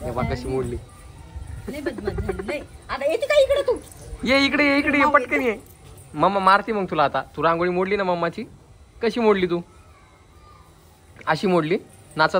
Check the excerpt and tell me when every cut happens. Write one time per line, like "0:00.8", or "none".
none